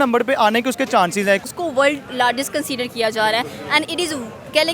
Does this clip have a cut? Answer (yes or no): yes